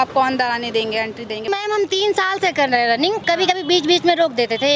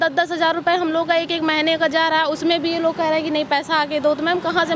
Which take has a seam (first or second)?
first